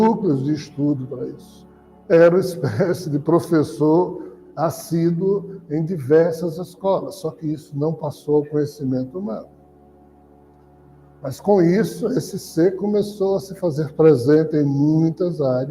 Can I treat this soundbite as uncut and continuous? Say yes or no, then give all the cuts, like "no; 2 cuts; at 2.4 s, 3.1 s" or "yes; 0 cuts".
no; 1 cut; at 1.6 s